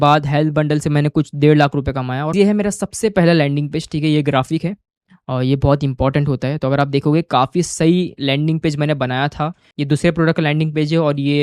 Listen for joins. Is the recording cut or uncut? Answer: cut